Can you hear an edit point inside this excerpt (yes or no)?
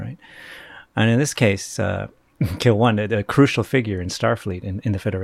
no